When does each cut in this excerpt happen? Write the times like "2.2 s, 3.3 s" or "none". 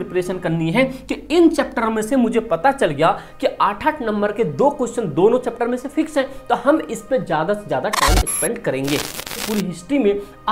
9.4 s